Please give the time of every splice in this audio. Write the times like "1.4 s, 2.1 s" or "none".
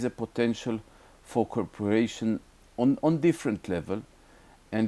none